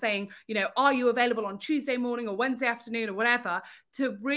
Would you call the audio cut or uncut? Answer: uncut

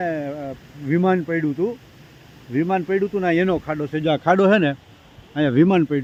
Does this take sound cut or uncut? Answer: uncut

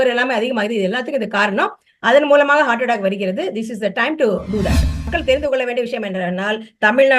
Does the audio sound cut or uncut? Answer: cut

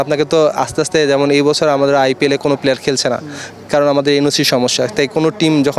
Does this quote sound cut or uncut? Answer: uncut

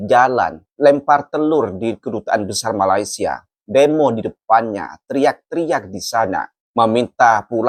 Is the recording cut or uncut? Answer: uncut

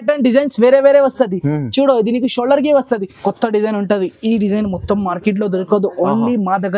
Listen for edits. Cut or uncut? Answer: cut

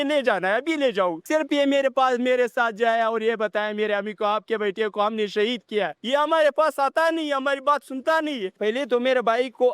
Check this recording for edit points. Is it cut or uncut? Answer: cut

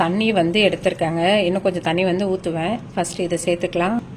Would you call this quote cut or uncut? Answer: uncut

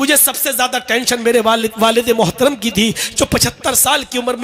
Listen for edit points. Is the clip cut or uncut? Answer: uncut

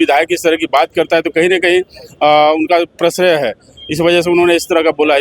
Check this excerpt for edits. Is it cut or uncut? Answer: uncut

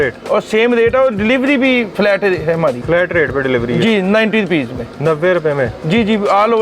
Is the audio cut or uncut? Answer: cut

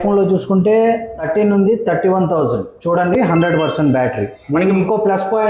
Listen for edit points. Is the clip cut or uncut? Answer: cut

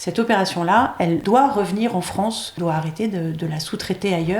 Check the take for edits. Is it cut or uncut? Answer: cut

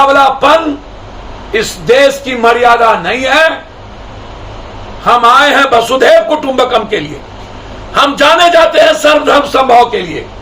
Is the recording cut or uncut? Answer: uncut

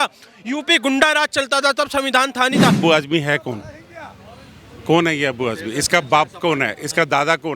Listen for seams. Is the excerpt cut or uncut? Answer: cut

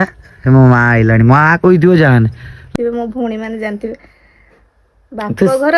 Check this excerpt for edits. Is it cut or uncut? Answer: cut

